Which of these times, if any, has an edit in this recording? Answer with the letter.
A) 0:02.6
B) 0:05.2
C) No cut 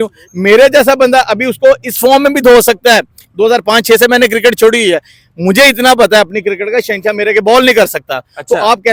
C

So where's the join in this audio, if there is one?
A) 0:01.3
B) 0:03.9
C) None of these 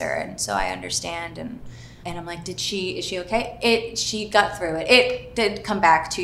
C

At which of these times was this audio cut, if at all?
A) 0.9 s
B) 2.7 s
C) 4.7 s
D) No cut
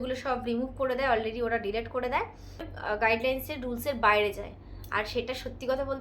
B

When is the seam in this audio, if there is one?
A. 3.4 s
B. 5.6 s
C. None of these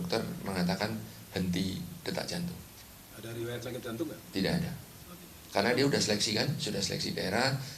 A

